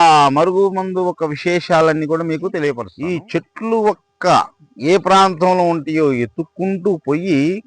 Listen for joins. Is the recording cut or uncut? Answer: cut